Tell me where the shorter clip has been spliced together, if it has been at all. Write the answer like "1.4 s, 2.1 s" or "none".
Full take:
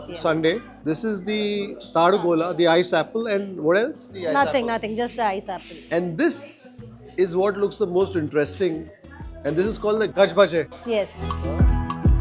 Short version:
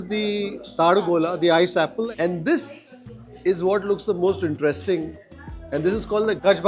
2.1 s